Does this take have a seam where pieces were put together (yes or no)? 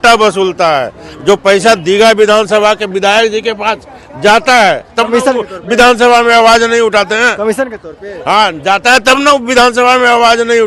no